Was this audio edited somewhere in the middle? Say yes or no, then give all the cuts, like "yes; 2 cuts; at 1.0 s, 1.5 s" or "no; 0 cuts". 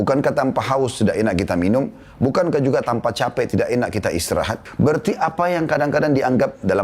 yes; 1 cut; at 4.6 s